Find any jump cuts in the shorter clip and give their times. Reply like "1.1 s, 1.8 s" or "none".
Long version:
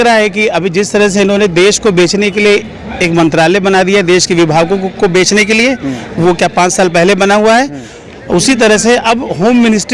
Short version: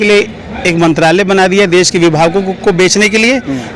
none